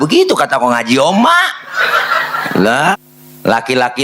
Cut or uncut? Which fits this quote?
cut